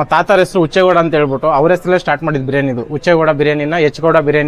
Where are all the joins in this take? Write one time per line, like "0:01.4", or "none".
none